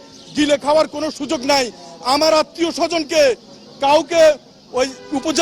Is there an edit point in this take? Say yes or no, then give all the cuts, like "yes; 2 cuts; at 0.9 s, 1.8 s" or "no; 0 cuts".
no; 0 cuts